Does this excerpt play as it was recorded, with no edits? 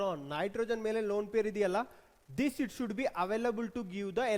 yes; 0 cuts

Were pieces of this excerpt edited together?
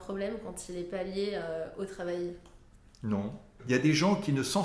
yes; 1 cut; at 3.6 s

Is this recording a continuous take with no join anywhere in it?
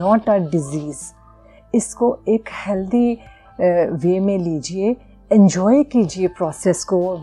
yes; 0 cuts

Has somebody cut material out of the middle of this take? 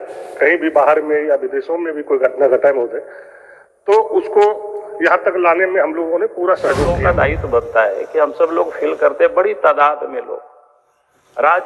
yes; 1 cut; at 6.9 s

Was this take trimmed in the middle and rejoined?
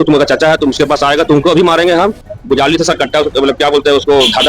yes; 1 cut; at 2.3 s

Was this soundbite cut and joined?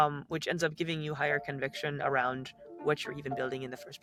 no; 0 cuts

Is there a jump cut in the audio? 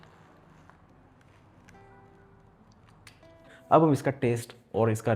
yes; 1 cut; at 3.5 s

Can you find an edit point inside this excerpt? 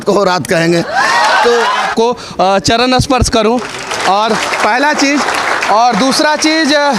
yes; 1 cut; at 1.9 s

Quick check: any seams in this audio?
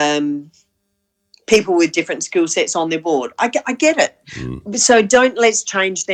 no; 0 cuts

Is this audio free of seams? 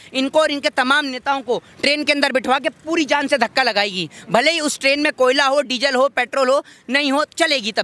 yes; 0 cuts

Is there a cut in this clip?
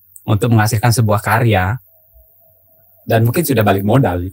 no; 0 cuts

